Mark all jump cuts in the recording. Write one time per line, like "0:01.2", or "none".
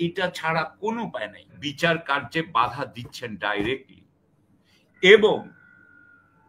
0:01.6